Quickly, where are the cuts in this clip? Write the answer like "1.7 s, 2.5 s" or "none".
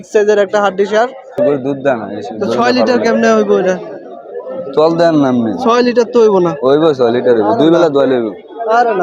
1.2 s